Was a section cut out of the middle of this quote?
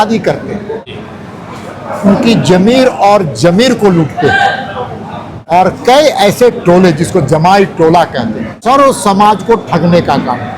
yes; 3 cuts; at 0.9 s, 5.3 s, 8.5 s

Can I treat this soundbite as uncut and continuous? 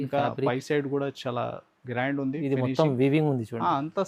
yes; 0 cuts

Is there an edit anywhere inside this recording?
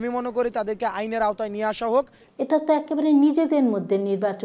yes; 1 cut; at 2.2 s

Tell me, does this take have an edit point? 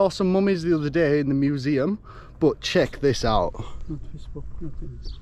no; 0 cuts

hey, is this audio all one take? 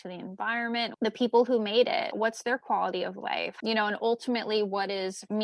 no; 2 cuts; at 0.9 s, 3.6 s

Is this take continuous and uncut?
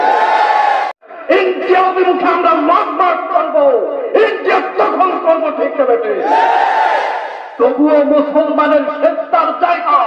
no; 1 cut; at 1.1 s

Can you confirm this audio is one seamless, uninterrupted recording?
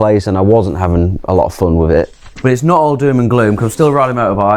no; 1 cut; at 2.2 s

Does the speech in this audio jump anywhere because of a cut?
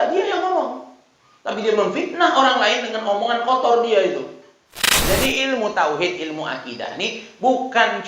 yes; 1 cut; at 5.0 s

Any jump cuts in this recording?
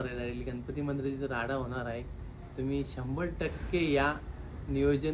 no; 0 cuts

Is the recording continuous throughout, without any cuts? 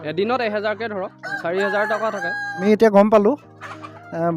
no; 1 cut; at 2.6 s

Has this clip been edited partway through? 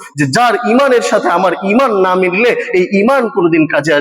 no; 0 cuts

